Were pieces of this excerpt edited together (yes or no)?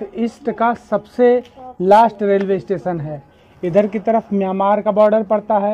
no